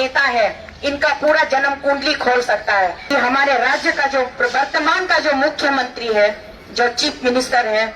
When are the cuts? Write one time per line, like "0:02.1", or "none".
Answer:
0:03.0